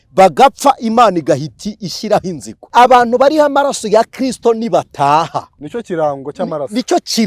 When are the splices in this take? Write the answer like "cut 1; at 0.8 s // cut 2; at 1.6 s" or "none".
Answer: cut 1; at 2.5 s